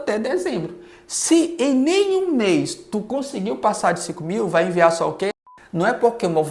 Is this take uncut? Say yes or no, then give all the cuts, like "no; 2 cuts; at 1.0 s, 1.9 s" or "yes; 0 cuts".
no; 1 cut; at 5.4 s